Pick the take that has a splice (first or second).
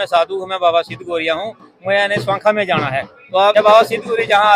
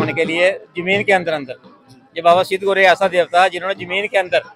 first